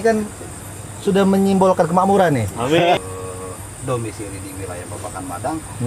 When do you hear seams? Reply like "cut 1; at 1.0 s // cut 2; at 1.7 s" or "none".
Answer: cut 1; at 3.0 s

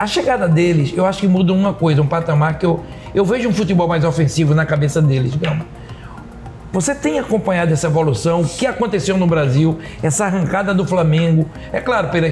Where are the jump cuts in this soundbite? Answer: none

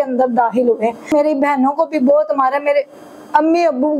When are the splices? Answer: cut 1; at 1.1 s

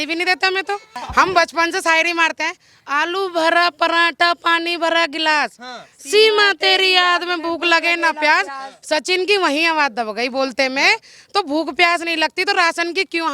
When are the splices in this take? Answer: cut 1; at 1.0 s

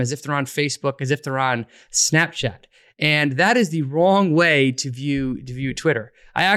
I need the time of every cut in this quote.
none

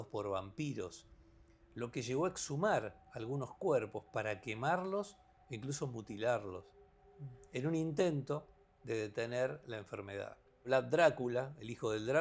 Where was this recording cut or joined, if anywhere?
cut 1; at 10.7 s

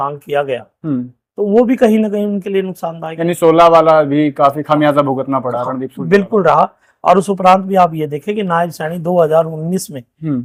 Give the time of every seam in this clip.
none

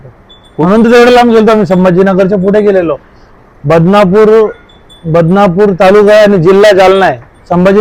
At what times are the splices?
none

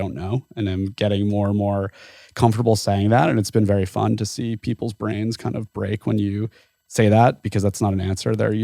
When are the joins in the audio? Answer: none

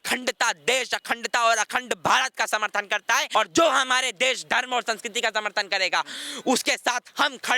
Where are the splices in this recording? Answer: cut 1; at 3.3 s

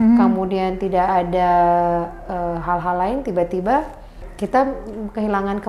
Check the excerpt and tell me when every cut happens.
none

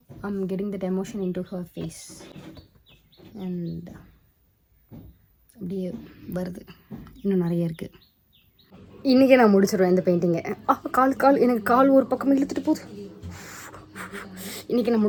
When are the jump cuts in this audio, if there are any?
none

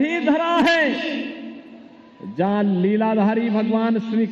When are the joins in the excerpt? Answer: cut 1; at 3.3 s

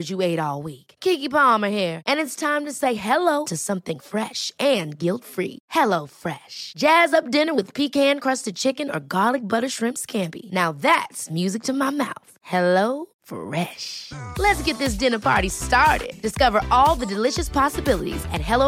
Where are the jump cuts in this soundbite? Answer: none

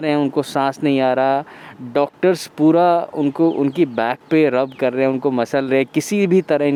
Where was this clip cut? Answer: none

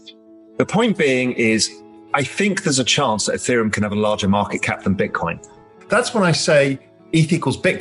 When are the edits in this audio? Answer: cut 1; at 5.8 s

